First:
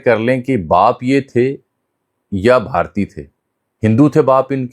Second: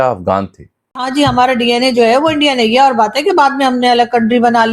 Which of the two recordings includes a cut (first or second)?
second